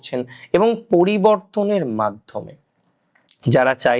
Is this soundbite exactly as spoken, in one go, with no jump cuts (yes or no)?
yes